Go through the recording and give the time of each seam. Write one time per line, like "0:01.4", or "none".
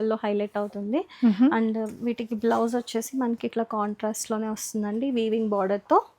none